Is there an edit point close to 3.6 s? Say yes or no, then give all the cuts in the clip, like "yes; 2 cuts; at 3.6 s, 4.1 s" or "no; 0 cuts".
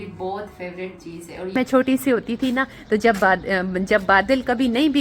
no; 1 cut; at 1.6 s